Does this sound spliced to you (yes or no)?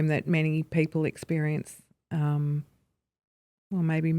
no